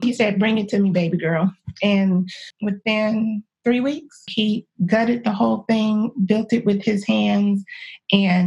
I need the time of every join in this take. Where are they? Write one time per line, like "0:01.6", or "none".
0:02.4
0:04.3